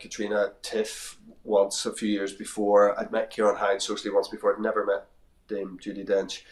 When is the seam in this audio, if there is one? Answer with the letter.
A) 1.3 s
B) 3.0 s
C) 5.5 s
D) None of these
D